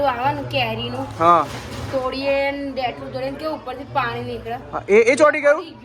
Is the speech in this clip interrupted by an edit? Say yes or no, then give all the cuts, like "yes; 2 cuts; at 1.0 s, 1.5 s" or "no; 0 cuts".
no; 0 cuts